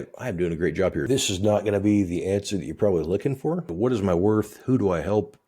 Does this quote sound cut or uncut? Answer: cut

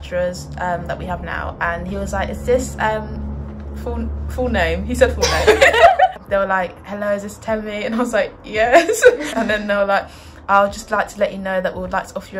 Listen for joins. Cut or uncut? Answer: uncut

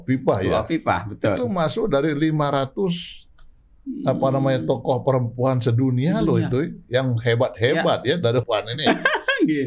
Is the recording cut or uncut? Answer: cut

